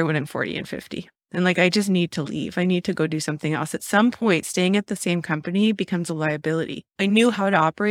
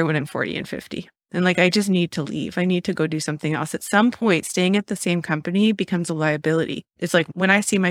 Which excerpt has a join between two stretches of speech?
first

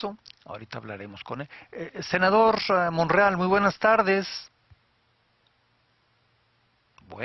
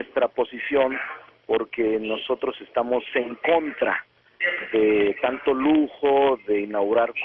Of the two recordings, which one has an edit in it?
second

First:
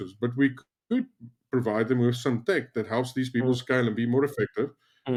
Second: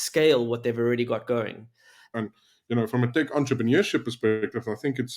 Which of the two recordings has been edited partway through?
second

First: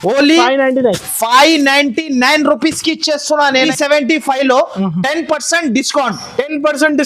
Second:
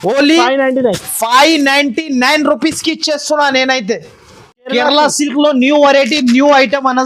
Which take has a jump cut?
first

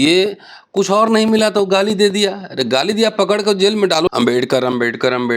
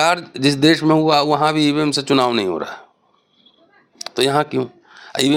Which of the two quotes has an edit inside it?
first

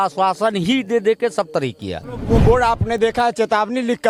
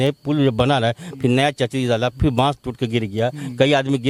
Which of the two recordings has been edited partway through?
first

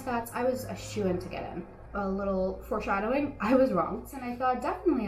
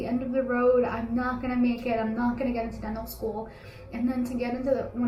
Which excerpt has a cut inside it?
first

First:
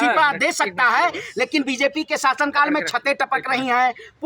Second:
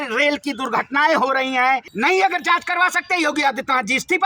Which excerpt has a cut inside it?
second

